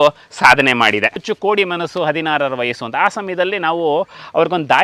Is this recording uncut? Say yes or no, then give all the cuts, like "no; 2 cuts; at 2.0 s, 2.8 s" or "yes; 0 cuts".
no; 1 cut; at 1.2 s